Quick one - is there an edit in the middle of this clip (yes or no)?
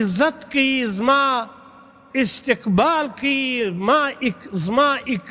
no